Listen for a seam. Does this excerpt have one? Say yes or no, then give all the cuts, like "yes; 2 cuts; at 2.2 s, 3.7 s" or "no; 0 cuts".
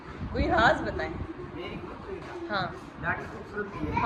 no; 0 cuts